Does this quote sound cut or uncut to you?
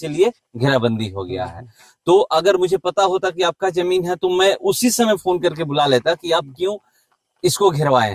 uncut